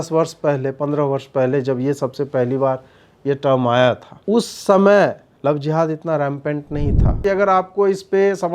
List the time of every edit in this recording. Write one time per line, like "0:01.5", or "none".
0:04.1
0:05.3
0:07.2